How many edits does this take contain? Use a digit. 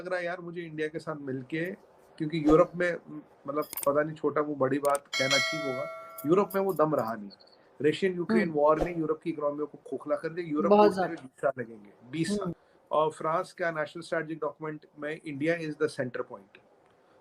1